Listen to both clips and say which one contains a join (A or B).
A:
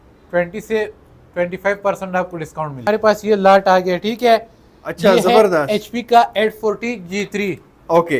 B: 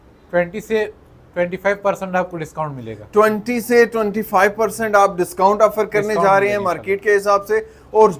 A